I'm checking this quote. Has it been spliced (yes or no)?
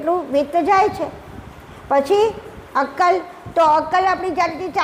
no